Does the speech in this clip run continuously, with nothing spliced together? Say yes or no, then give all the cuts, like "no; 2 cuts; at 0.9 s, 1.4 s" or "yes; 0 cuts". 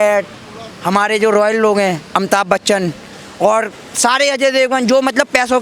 yes; 0 cuts